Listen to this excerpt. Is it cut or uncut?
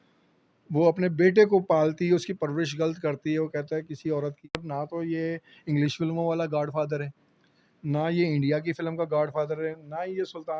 cut